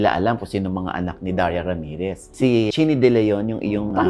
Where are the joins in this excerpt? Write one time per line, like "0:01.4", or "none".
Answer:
0:02.7